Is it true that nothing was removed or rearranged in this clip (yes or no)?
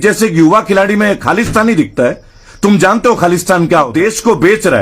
no